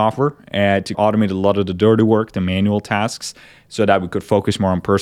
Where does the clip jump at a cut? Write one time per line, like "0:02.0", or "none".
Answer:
0:01.0